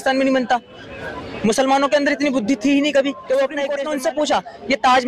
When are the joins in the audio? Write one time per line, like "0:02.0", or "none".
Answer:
0:03.8